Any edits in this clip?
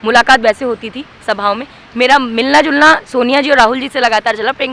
no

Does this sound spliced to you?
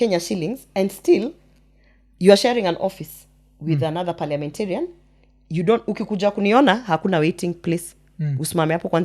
no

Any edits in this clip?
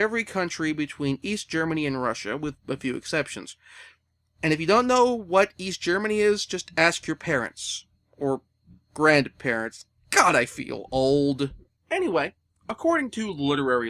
no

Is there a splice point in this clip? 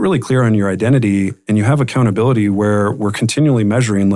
no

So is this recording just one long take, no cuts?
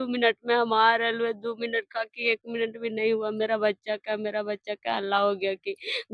yes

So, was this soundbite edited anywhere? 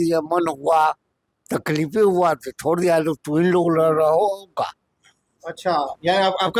no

